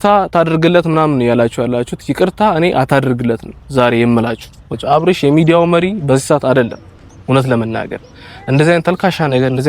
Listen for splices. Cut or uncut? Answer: cut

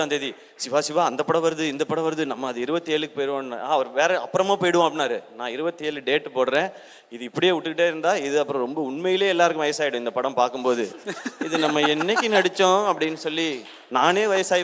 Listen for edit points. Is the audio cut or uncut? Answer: uncut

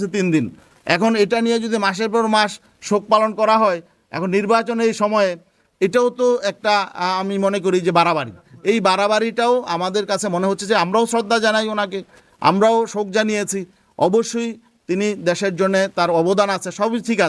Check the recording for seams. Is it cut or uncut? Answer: uncut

